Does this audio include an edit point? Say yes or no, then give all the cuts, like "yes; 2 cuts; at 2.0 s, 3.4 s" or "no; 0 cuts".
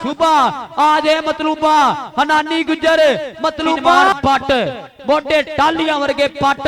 yes; 1 cut; at 4.1 s